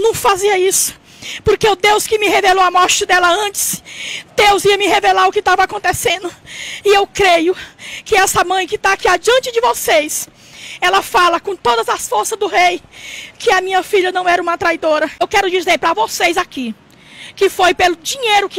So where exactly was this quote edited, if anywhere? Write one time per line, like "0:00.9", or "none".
0:15.2